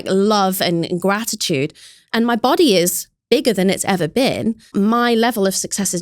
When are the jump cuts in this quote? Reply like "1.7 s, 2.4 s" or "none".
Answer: 4.7 s

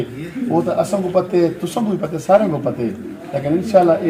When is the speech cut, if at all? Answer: none

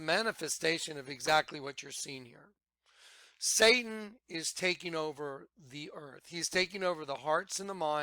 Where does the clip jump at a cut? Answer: 1.1 s

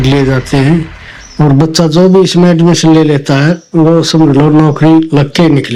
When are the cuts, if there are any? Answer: none

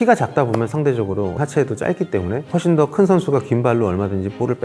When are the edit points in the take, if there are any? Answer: 1.4 s, 2.5 s

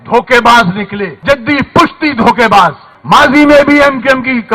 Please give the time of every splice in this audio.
1.2 s, 2.9 s

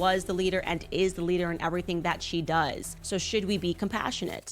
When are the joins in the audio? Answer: 2.9 s

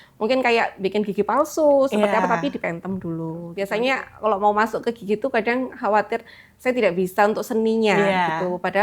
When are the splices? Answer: 3.5 s

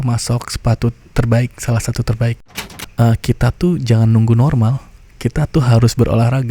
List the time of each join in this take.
2.4 s

